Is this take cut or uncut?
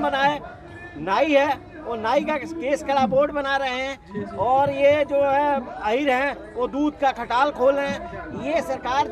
uncut